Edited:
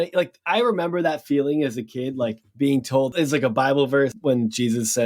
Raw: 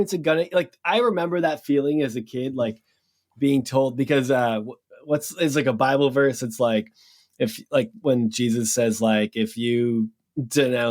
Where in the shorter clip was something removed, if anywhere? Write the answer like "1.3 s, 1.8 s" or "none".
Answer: 3.0 s, 4.2 s